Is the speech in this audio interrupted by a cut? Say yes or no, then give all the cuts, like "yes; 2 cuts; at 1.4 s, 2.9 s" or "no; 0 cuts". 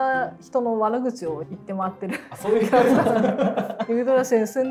yes; 1 cut; at 3.8 s